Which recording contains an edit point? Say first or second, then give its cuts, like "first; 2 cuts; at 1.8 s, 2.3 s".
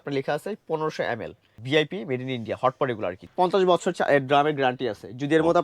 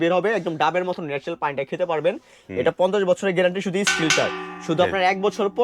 first; 2 cuts; at 1.6 s, 3.2 s